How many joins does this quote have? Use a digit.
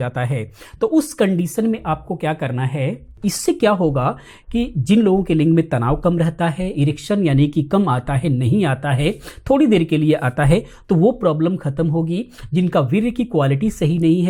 1